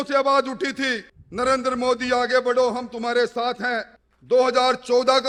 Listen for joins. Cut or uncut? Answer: uncut